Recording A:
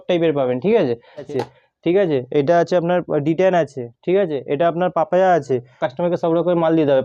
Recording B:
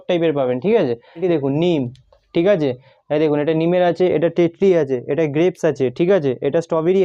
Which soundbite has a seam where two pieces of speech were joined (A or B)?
A